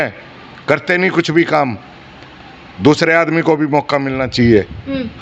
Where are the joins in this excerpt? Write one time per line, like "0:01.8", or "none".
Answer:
none